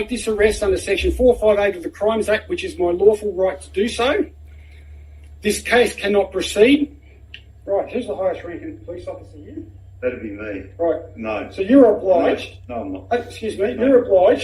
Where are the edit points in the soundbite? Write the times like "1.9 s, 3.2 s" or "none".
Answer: none